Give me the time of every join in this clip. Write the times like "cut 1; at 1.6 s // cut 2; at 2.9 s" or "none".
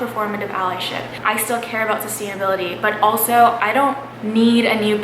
cut 1; at 1.2 s // cut 2; at 4.1 s